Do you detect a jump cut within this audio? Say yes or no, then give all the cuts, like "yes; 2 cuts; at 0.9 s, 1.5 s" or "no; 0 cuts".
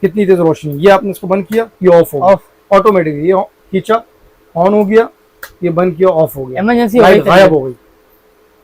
no; 0 cuts